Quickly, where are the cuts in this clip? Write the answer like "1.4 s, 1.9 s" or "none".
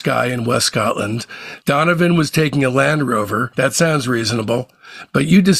1.5 s